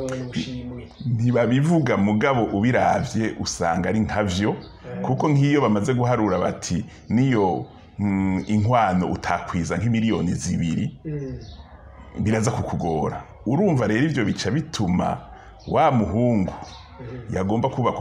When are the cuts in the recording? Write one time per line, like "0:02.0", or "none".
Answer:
none

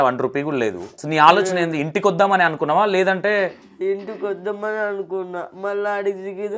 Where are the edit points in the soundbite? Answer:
0:00.9

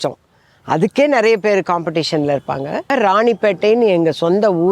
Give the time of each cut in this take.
0:02.9

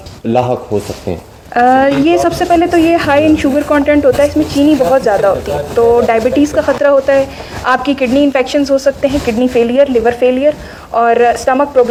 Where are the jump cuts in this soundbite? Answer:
none

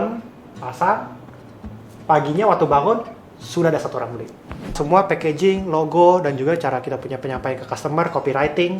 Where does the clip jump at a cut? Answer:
0:04.8

